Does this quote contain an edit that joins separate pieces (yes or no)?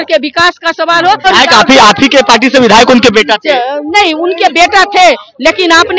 yes